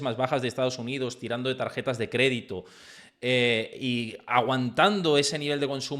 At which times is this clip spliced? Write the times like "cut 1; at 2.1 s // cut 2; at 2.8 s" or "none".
none